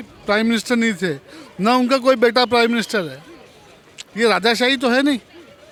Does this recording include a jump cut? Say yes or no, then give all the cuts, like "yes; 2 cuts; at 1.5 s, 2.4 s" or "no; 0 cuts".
no; 0 cuts